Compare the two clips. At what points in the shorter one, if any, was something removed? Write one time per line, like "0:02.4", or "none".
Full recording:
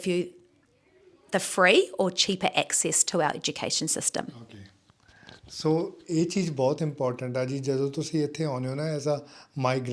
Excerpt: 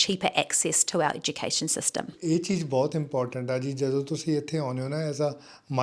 0:02.1